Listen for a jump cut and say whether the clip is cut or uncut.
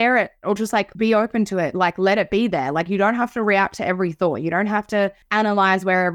cut